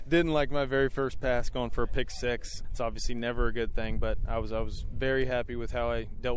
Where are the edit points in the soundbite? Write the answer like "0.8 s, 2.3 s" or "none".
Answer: 2.6 s